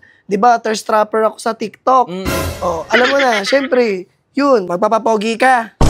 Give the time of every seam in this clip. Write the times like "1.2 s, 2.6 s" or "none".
4.7 s